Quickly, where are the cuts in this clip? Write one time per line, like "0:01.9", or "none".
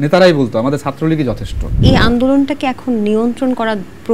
0:01.7